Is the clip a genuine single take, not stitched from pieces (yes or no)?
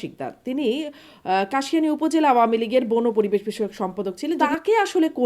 no